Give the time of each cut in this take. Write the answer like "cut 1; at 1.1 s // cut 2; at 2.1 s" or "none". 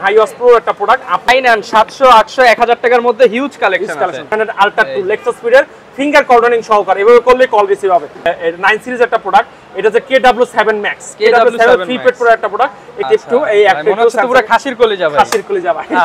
cut 1; at 1.3 s // cut 2; at 4.3 s // cut 3; at 8.2 s // cut 4; at 13.0 s